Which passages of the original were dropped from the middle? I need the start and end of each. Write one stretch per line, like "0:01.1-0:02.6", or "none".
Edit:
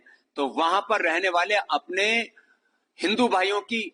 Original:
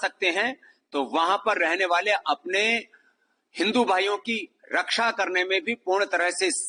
none

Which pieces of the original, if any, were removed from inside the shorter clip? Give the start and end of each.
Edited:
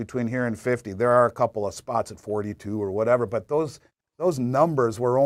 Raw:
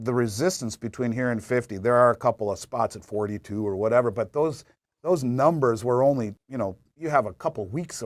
none

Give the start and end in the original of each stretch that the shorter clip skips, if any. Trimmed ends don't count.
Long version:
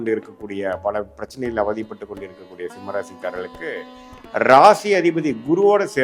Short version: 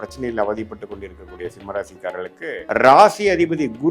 0:03.8-0:04.3

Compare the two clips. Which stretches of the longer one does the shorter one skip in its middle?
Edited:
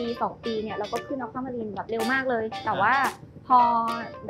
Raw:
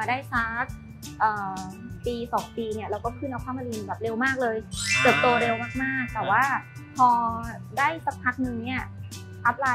0:04.7-0:06.1

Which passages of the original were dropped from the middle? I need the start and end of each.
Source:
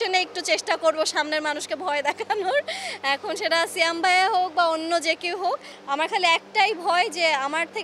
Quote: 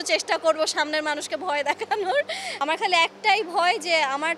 0:02.8-0:05.8

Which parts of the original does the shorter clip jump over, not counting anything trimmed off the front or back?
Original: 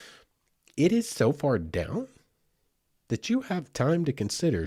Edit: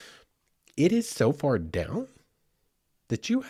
none

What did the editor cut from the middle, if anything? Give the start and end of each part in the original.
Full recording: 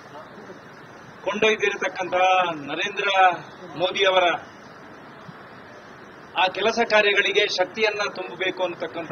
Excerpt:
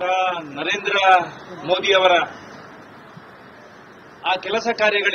none

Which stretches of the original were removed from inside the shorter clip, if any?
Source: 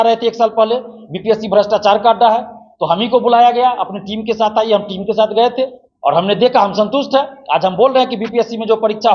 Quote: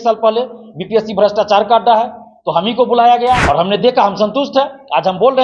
0:03.8-0:06.0

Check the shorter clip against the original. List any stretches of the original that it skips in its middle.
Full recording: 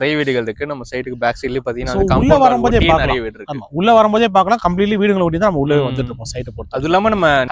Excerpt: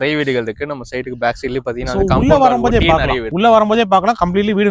0:03.2-0:03.7

